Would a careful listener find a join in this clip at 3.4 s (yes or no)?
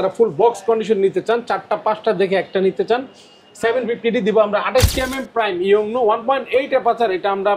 no